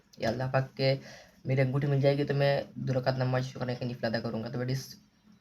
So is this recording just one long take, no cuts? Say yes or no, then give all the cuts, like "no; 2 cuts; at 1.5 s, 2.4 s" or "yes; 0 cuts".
yes; 0 cuts